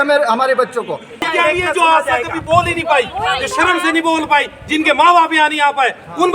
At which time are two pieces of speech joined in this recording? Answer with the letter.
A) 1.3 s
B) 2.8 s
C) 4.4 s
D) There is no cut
A